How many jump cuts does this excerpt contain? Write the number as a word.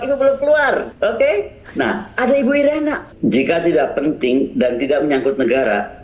two